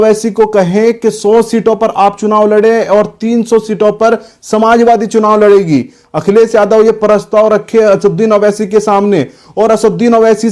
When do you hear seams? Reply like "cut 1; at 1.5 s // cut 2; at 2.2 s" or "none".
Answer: none